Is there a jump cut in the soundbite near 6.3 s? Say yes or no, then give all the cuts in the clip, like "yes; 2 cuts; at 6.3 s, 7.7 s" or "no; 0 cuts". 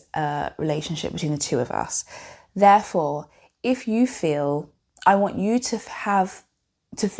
no; 0 cuts